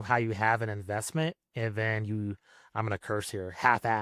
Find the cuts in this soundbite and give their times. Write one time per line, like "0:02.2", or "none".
none